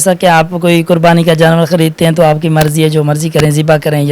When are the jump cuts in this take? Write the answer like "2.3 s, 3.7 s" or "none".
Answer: none